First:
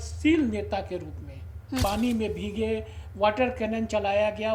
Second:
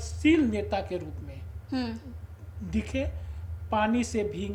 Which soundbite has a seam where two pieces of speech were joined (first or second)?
first